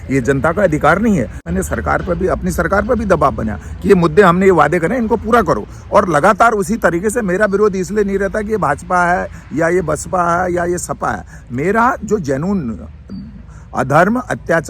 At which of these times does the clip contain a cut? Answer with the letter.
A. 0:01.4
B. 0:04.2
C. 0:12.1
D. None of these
A